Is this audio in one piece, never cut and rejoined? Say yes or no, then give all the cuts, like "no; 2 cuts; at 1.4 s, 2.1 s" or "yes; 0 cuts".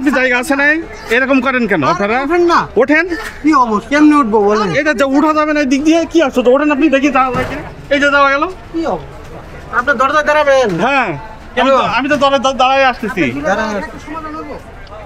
yes; 0 cuts